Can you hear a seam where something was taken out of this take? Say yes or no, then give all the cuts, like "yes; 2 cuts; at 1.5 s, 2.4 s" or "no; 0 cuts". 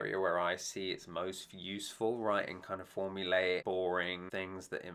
no; 0 cuts